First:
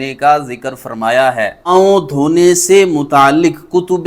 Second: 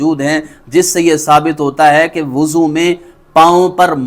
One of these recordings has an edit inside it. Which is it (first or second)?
first